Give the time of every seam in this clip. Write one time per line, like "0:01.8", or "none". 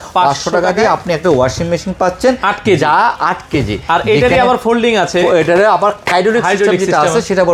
none